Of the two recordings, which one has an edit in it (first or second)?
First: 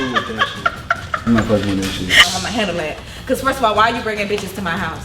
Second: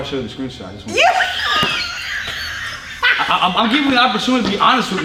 first